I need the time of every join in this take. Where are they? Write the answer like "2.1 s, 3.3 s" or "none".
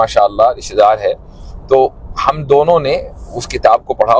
none